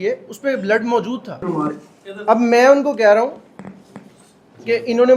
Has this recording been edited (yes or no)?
yes